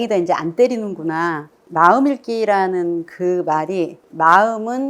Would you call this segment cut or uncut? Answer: cut